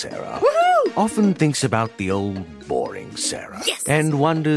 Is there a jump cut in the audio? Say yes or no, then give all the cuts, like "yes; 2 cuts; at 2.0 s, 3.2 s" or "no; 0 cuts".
no; 0 cuts